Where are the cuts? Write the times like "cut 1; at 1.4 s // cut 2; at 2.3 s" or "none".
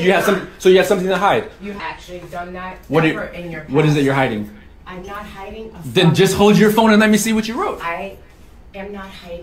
cut 1; at 1.7 s